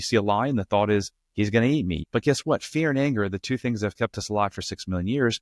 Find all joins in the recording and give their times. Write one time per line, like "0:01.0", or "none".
0:02.0